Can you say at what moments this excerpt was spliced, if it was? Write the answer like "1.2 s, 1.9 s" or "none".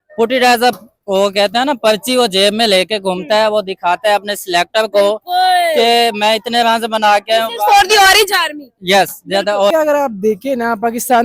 9.7 s